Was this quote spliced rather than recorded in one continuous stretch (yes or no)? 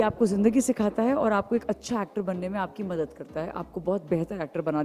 no